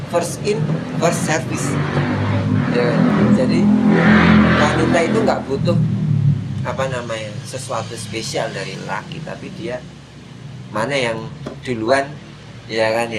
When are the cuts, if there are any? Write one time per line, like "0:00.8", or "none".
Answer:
none